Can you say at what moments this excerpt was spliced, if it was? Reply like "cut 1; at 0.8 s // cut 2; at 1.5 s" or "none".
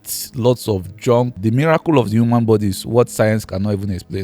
cut 1; at 1.4 s